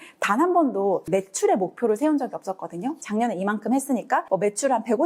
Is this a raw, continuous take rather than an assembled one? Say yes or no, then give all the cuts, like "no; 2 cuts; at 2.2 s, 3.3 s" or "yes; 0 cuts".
no; 2 cuts; at 1.0 s, 4.2 s